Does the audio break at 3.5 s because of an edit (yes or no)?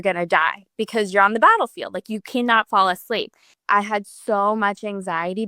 yes